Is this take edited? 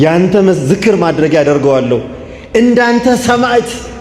no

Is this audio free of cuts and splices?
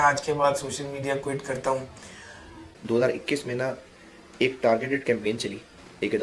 no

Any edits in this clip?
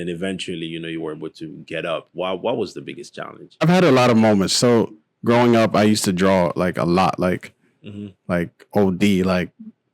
yes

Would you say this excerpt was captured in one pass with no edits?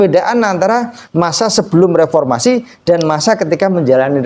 yes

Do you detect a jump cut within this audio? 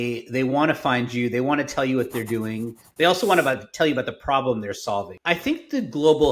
yes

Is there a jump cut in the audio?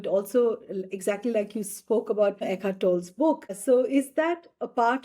yes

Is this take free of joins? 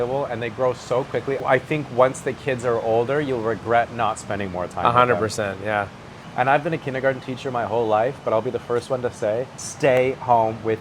no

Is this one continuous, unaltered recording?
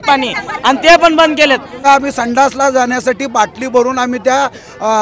no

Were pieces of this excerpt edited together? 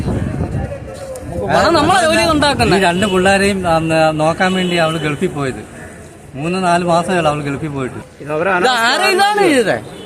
yes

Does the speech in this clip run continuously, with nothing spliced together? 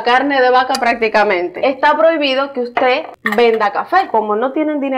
no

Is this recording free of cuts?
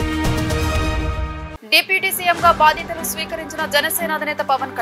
no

